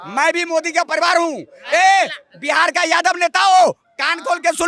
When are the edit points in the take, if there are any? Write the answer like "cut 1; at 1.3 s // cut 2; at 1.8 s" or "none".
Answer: none